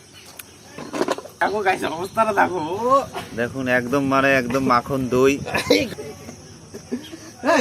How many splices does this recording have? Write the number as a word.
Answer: two